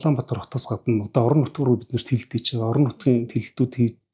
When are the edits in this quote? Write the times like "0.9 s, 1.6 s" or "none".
none